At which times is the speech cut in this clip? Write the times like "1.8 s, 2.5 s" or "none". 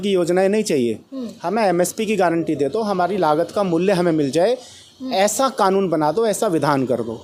none